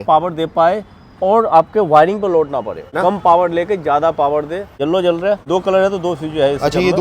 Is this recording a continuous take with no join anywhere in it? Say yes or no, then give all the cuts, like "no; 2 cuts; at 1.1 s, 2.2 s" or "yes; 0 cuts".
no; 3 cuts; at 2.9 s, 4.7 s, 5.5 s